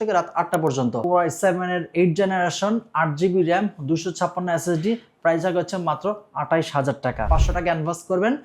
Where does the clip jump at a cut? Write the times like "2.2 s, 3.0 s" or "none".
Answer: 1.0 s, 7.3 s